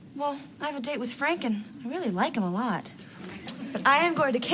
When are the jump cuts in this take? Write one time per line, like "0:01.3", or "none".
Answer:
0:03.1